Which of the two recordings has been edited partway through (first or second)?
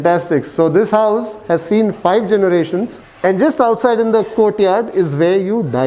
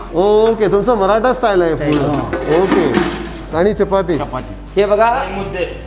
second